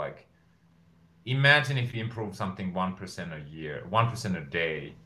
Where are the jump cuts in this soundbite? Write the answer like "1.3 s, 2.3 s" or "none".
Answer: none